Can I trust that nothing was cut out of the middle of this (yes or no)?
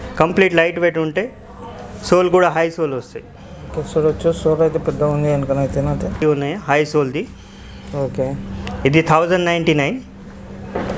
yes